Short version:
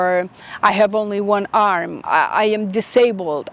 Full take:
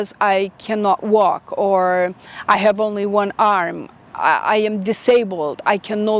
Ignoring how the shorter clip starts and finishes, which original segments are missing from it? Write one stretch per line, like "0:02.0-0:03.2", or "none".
0:03.8-0:04.1